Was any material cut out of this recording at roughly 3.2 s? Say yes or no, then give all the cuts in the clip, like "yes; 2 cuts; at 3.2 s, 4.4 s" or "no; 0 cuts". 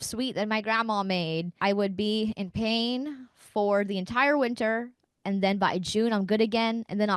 no; 1 cut; at 1.5 s